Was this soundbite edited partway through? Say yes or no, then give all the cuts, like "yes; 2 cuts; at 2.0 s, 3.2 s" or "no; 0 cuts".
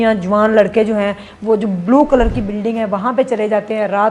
no; 0 cuts